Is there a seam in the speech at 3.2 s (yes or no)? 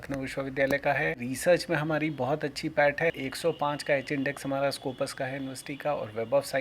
yes